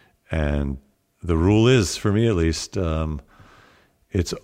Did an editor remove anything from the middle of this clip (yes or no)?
yes